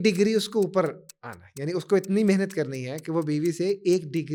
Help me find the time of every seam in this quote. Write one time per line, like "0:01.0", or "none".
none